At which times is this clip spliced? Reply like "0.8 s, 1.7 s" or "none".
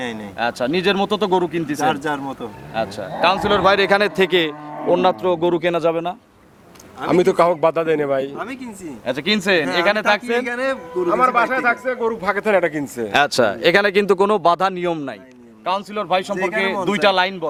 none